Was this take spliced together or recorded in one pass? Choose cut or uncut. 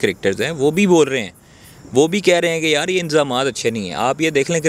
uncut